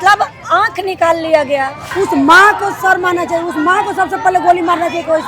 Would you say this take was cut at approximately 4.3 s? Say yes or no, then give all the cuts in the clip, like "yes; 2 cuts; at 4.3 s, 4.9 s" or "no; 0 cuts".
no; 1 cut; at 1.8 s